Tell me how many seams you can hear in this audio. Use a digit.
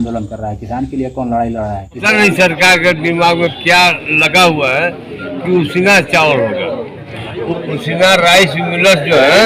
2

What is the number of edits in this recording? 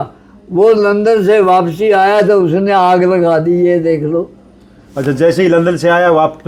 0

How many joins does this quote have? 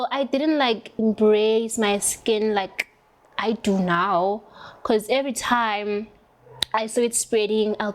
1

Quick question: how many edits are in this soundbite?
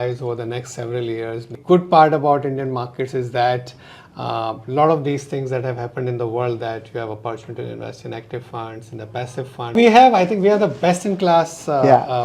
2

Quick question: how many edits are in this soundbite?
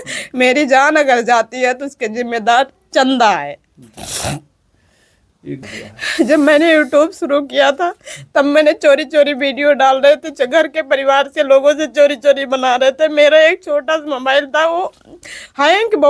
1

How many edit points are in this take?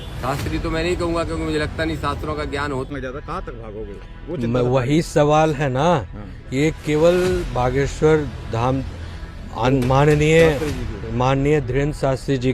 1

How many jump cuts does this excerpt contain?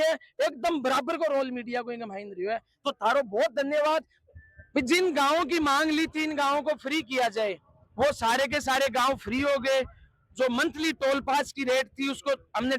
1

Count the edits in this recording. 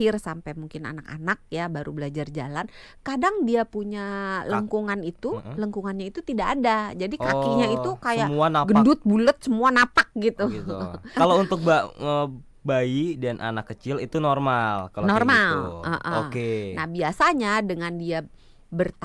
1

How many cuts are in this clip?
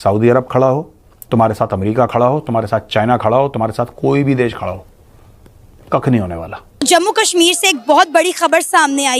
1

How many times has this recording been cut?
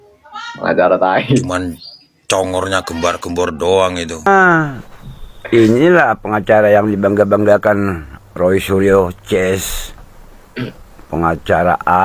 1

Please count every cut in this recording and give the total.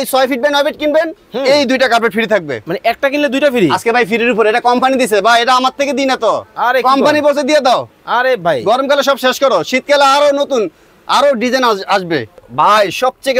1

